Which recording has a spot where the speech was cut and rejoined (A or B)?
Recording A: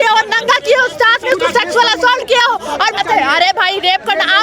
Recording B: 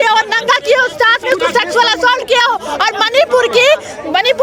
A